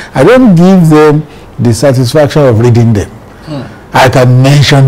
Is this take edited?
no; 0 cuts

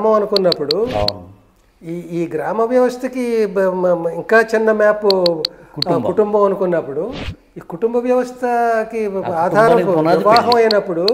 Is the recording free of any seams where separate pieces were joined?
yes; 0 cuts

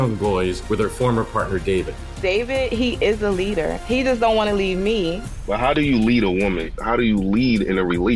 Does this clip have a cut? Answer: no; 0 cuts

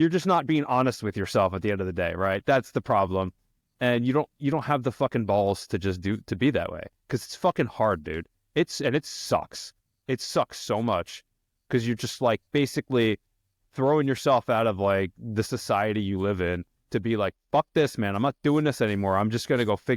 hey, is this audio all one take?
yes; 0 cuts

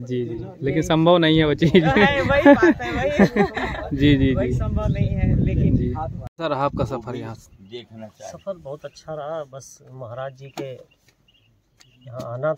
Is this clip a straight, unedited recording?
no; 1 cut; at 6.4 s

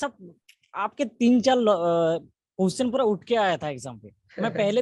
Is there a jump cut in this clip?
no; 0 cuts

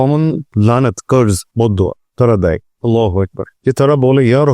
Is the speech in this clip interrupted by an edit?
yes; 2 cuts; at 1.5 s, 2.7 s

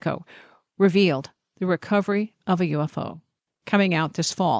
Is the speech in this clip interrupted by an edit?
yes; 1 cut; at 3.4 s

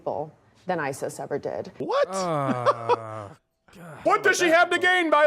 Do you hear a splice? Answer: yes; 2 cuts; at 1.7 s, 4.0 s

